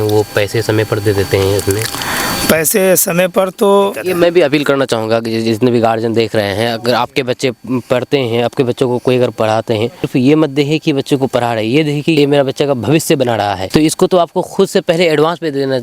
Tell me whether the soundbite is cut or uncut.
cut